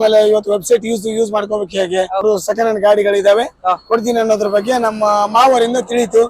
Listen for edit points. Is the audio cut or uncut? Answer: cut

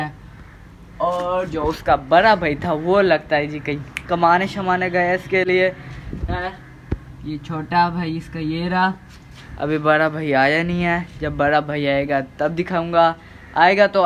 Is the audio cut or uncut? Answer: uncut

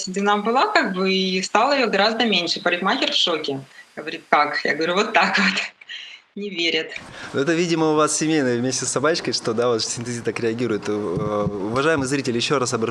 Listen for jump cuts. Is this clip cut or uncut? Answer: uncut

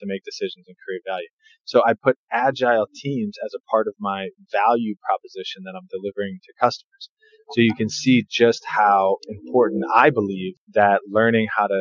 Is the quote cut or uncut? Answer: uncut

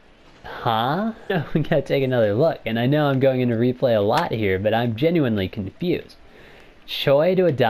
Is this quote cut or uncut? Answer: cut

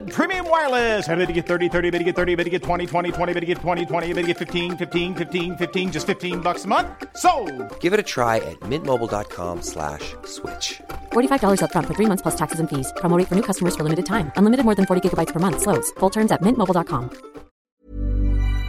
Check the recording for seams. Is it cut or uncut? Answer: cut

